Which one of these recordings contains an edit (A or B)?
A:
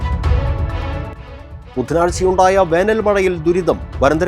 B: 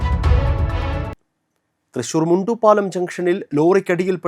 B